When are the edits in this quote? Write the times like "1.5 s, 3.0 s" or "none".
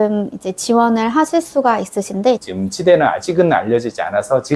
2.4 s